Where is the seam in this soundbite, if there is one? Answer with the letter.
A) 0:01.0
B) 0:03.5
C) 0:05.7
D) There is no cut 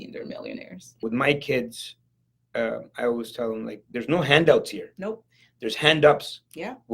A